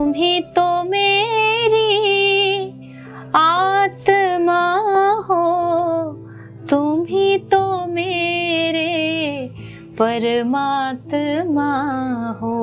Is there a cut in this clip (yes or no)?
no